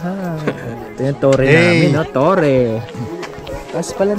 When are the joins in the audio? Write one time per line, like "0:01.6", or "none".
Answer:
0:00.8
0:02.9